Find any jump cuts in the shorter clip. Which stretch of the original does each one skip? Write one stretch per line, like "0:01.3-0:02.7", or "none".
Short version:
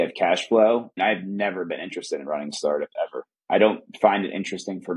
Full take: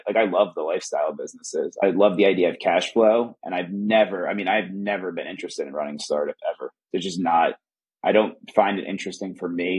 0:03.4-0:04.4
0:06.7-0:07.8

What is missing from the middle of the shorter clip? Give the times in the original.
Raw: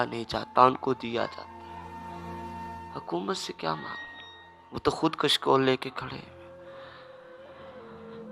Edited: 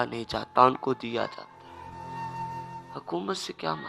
none

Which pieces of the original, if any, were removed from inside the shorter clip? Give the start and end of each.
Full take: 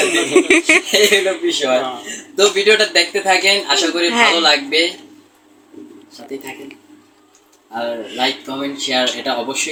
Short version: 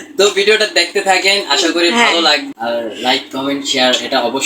0:04.6-0:07.6

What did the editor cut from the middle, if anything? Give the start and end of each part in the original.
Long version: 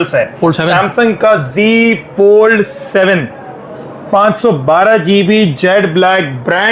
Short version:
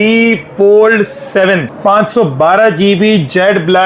0:03.3-0:04.0

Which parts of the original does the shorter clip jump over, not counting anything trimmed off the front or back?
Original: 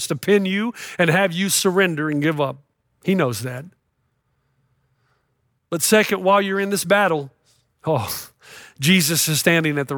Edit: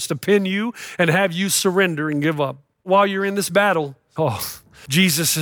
0:02.9-0:06.2
0:07.6-0:08.2

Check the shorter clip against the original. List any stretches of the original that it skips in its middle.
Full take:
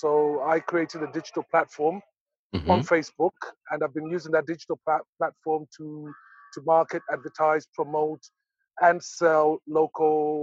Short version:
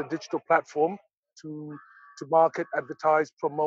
0:02.4-0:05.7

